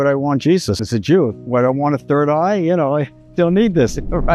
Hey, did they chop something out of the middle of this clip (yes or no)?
yes